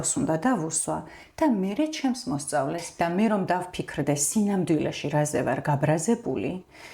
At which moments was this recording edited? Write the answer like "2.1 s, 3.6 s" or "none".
2.9 s